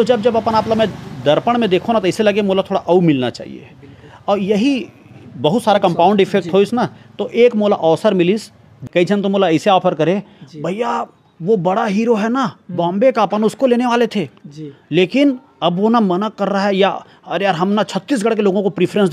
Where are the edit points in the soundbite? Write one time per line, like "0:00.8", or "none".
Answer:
0:08.9